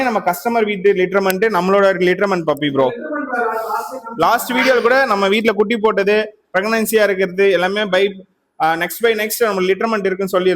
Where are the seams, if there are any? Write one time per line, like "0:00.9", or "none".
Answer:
none